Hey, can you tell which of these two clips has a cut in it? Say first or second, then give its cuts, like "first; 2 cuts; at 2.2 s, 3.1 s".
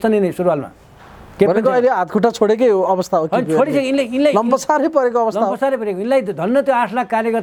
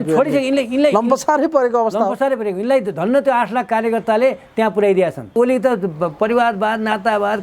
second; 1 cut; at 5.4 s